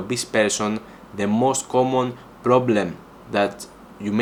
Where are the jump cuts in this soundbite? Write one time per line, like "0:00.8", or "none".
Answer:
none